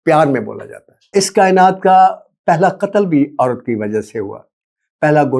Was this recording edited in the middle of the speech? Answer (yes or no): yes